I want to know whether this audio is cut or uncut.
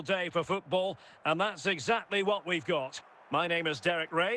cut